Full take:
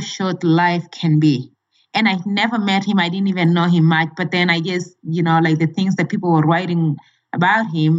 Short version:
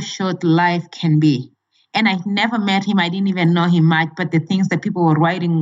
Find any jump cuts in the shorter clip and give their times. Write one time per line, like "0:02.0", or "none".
0:04.3

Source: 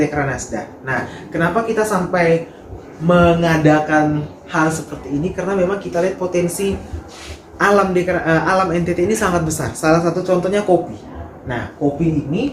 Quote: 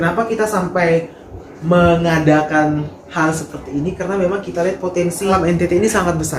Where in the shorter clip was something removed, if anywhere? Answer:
0:05.3

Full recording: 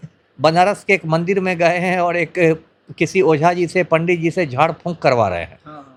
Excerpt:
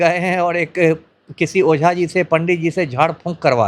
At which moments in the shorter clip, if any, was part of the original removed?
none

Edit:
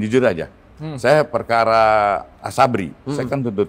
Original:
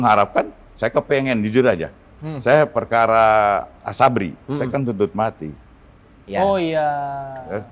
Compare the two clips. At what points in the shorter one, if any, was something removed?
none

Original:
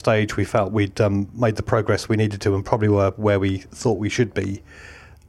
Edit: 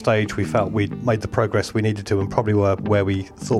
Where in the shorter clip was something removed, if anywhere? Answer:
0:00.9

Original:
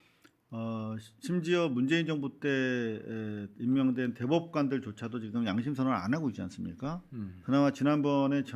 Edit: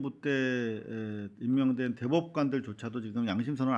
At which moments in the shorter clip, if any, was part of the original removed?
none

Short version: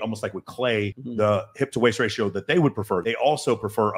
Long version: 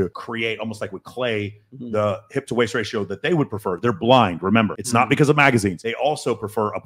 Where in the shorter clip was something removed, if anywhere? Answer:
0:01.0
0:03.0

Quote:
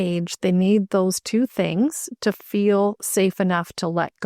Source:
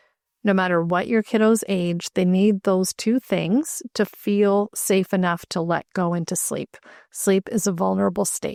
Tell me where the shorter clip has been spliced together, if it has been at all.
none

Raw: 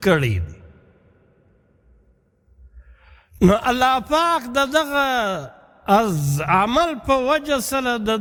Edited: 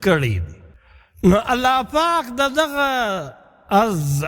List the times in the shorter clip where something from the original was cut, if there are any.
0:01.3

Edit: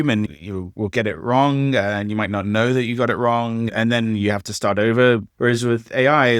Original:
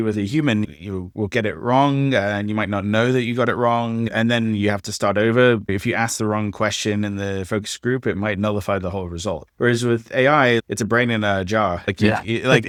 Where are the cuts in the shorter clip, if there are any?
0:05.3

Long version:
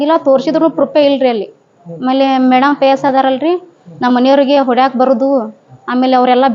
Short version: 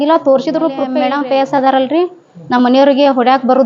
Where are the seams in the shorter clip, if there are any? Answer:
0:00.9

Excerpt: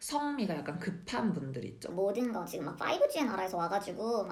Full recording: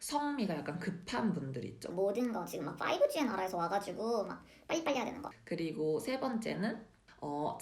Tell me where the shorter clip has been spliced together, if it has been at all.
none

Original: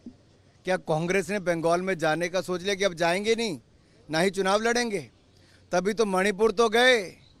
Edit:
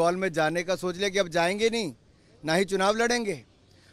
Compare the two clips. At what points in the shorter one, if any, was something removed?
none

